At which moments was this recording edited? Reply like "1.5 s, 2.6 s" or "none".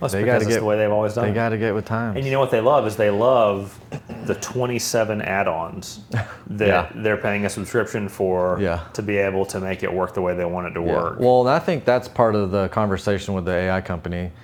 none